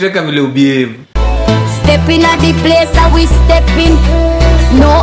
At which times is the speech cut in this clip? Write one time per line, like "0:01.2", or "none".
0:01.2